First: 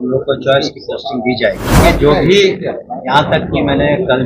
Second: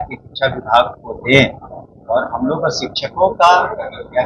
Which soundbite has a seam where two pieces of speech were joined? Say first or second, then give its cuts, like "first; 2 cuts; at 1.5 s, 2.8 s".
first; 1 cut; at 1.7 s